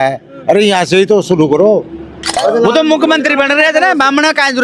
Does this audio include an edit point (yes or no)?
yes